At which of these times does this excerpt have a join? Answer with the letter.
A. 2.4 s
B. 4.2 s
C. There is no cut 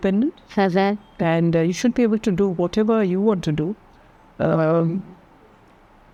C